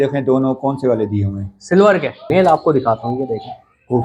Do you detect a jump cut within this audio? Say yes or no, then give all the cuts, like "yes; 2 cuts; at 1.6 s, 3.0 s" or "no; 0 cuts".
yes; 1 cut; at 2.2 s